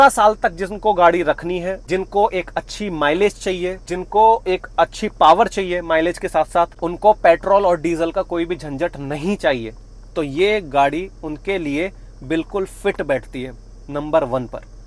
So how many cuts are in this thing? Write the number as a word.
three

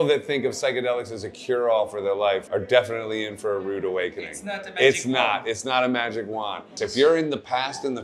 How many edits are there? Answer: one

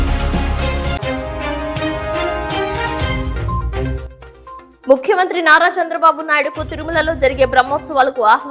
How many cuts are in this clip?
one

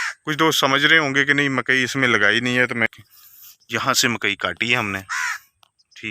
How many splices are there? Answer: one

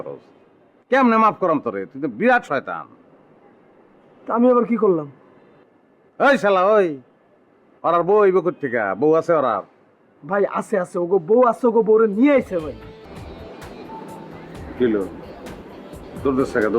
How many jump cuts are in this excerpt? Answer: one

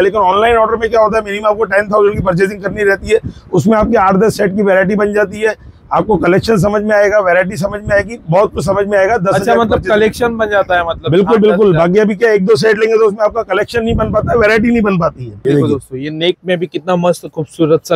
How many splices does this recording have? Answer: one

